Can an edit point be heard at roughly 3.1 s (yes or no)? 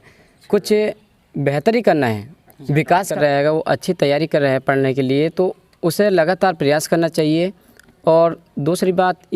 yes